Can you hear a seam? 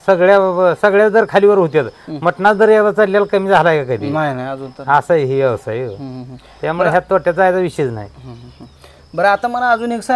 no; 0 cuts

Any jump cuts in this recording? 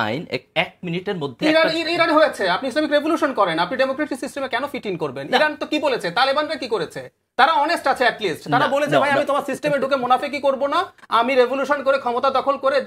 no; 0 cuts

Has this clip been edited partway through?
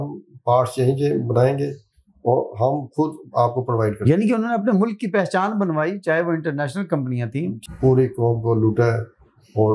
yes; 1 cut; at 7.6 s

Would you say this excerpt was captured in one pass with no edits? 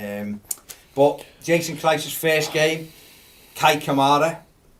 yes; 0 cuts

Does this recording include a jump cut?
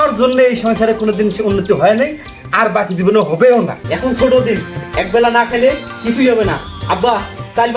yes; 1 cut; at 3.8 s

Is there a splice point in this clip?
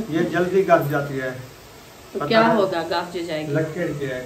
no; 0 cuts

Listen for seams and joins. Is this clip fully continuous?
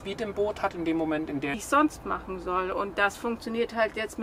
no; 1 cut; at 1.6 s

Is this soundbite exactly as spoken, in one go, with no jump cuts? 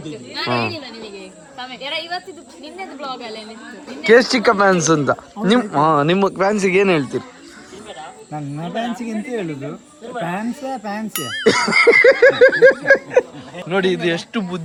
yes; 0 cuts

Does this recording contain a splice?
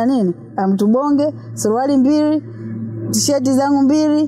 no; 0 cuts

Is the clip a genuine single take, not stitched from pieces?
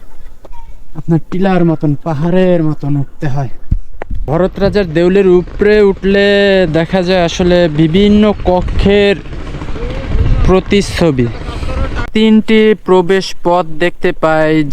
no; 2 cuts; at 4.3 s, 12.1 s

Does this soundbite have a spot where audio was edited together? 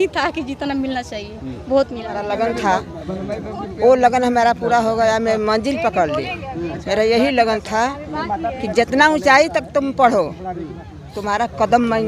yes; 1 cut; at 2.2 s

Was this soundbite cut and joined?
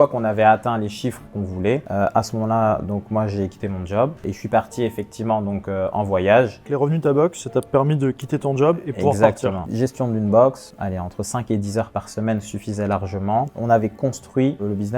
yes; 6 cuts; at 1.9 s, 4.2 s, 6.7 s, 9.6 s, 10.7 s, 13.5 s

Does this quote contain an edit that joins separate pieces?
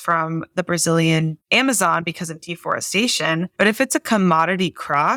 no; 0 cuts

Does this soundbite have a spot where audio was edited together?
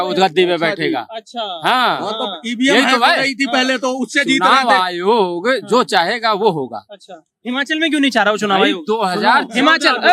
no; 0 cuts

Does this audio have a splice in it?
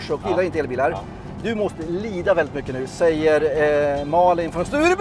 no; 0 cuts

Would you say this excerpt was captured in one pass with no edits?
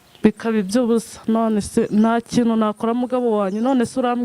yes; 0 cuts

